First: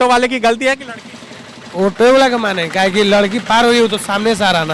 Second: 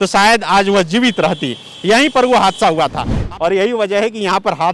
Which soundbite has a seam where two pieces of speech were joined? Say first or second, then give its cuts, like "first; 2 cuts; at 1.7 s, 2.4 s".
second; 1 cut; at 3.1 s